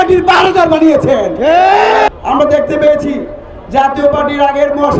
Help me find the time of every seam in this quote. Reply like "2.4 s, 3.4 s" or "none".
2.1 s